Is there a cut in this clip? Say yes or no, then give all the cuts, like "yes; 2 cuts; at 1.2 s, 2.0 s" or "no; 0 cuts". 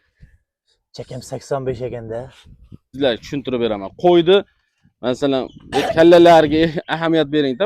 yes; 1 cut; at 2.9 s